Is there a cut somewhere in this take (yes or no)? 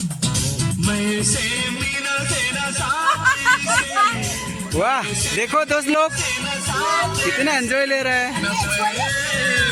no